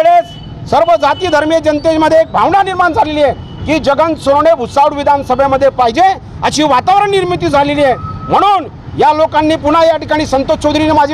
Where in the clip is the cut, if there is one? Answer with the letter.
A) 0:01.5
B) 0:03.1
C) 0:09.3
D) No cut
D